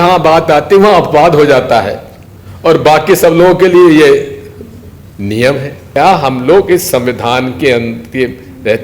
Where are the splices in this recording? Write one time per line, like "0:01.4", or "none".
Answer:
0:06.0